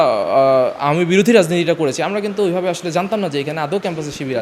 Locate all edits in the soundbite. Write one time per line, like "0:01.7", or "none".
none

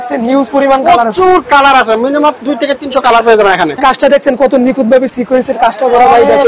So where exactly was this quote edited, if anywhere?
0:03.8

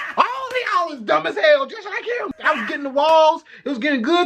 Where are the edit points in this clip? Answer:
0:02.3

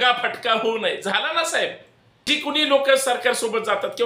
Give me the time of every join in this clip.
0:02.2

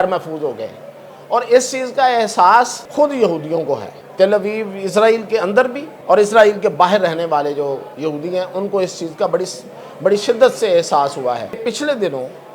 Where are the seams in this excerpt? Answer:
0:02.8
0:04.0
0:05.9
0:11.7

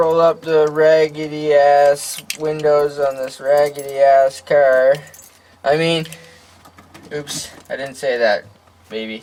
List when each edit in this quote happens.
none

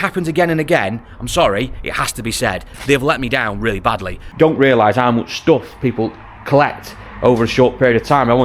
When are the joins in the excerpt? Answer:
0:04.3

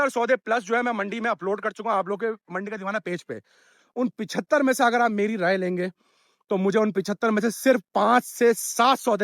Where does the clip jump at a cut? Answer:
none

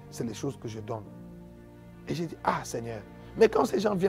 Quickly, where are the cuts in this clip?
none

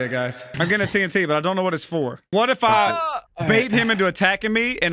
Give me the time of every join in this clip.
0:02.3

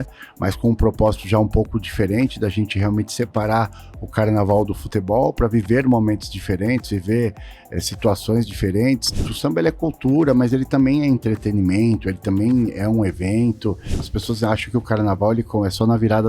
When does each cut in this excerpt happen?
0:09.3
0:14.0

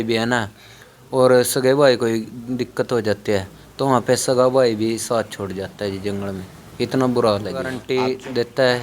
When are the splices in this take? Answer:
0:07.8

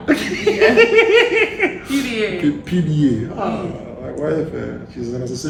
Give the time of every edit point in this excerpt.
none

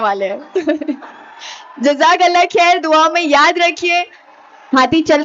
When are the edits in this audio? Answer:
0:04.2

